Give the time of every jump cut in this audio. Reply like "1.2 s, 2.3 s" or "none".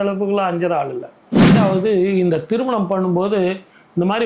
1.5 s

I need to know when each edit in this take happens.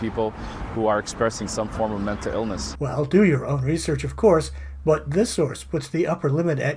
none

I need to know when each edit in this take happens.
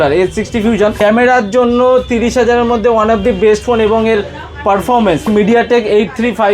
1.0 s, 5.3 s

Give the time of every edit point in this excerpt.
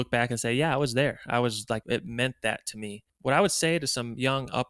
1.8 s, 3.1 s

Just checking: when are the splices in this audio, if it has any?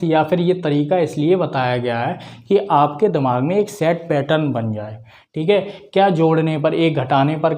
none

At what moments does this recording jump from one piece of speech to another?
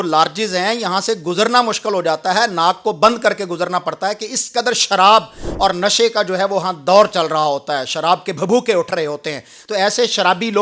none

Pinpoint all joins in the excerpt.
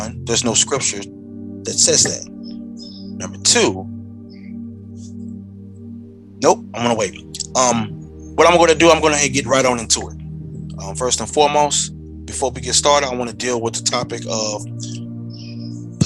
none

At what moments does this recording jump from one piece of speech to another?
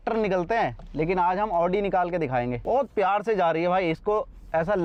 none

